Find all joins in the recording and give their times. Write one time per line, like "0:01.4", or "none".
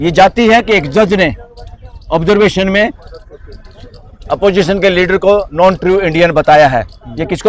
none